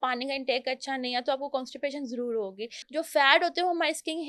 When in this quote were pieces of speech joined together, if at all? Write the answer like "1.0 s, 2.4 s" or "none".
2.8 s